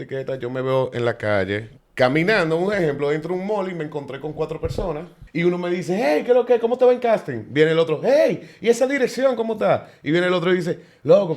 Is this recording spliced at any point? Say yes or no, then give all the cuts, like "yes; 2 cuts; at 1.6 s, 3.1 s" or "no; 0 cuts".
yes; 2 cuts; at 1.8 s, 5.2 s